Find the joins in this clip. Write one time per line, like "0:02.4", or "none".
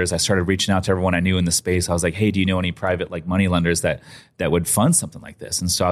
none